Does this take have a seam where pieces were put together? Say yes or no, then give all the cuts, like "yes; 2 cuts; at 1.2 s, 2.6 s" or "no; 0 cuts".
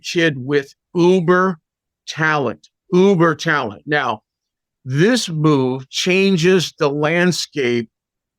no; 0 cuts